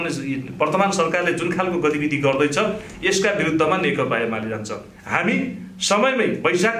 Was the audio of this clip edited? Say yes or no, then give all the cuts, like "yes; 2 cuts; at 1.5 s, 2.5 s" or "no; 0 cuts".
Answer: no; 0 cuts